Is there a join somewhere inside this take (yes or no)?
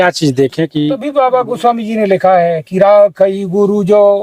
yes